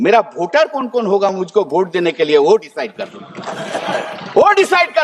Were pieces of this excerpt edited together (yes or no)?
no